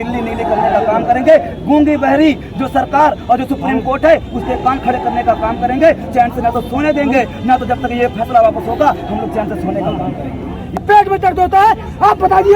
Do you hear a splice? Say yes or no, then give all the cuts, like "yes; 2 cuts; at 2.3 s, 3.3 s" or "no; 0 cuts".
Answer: yes; 1 cut; at 10.8 s